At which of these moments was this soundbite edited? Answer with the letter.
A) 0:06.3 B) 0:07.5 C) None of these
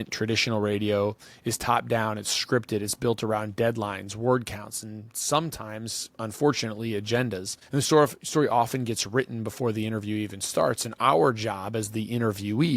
B